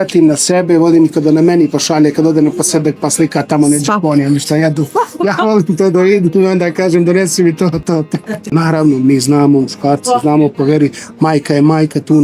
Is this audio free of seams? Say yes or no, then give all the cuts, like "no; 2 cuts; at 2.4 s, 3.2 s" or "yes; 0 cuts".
no; 1 cut; at 8.4 s